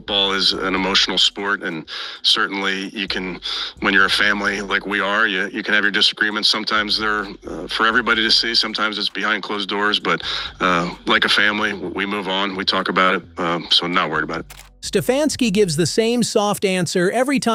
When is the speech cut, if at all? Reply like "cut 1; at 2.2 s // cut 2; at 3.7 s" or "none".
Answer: none